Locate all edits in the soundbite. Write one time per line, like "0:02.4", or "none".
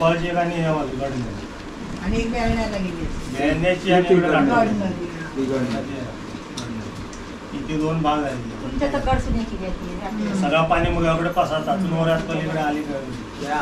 none